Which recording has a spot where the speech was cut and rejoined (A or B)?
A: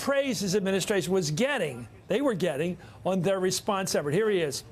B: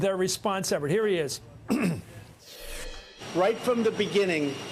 B